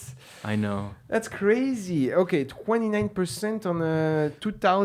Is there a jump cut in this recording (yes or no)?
no